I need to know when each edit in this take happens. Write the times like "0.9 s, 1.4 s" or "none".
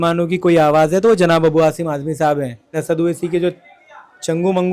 2.8 s